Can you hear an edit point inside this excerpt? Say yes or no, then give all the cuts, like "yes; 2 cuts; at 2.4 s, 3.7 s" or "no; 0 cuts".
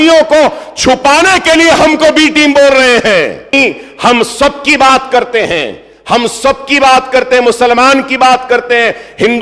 yes; 1 cut; at 3.5 s